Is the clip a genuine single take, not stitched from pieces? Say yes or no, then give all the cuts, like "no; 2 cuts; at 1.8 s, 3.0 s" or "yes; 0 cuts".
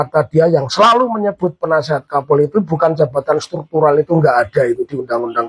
yes; 0 cuts